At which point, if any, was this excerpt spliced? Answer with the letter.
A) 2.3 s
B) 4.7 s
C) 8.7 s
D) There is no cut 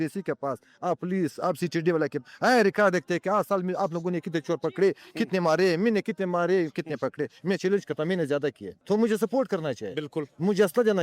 C